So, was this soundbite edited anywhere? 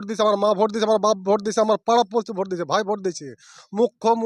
no; 0 cuts

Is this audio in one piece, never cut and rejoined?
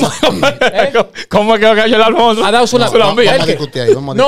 yes; 0 cuts

